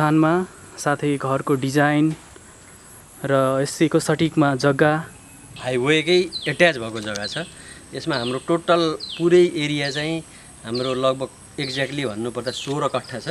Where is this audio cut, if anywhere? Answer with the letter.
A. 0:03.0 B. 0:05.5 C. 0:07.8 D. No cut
B